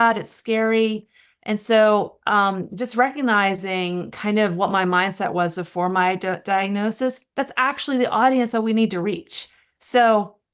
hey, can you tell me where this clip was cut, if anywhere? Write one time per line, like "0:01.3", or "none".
none